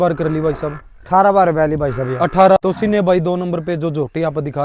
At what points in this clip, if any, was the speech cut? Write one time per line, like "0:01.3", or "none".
0:02.6